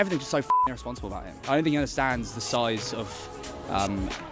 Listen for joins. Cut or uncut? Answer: uncut